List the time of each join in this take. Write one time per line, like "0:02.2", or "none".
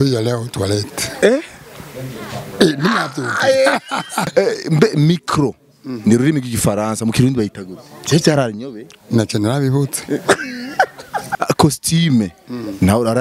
0:04.3
0:11.3